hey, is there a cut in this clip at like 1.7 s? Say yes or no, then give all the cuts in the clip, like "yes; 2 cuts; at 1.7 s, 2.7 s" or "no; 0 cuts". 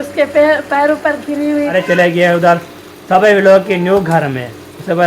yes; 1 cut; at 1.7 s